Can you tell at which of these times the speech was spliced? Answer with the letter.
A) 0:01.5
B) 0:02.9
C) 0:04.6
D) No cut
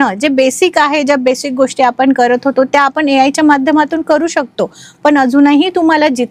D